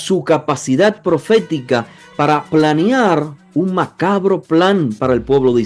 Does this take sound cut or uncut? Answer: uncut